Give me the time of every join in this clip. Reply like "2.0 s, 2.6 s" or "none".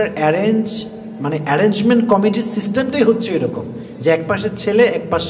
none